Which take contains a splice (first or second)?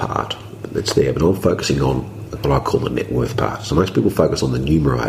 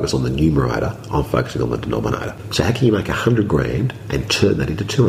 second